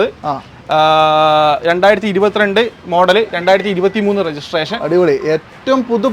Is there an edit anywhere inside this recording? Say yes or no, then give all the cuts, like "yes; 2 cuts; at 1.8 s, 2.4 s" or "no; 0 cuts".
no; 0 cuts